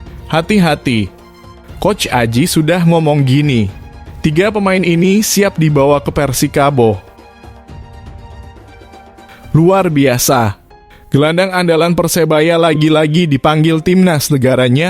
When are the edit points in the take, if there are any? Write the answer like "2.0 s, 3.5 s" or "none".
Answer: 7.4 s, 9.5 s